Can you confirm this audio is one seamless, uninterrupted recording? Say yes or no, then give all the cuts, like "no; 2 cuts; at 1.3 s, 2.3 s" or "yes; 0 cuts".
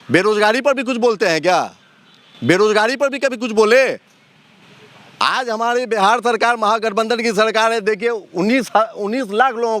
yes; 0 cuts